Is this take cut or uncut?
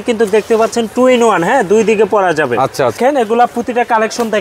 cut